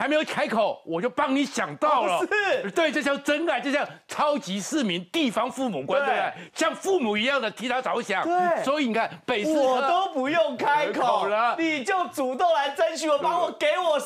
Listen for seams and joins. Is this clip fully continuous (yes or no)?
yes